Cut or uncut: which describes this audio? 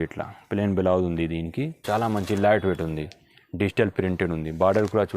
cut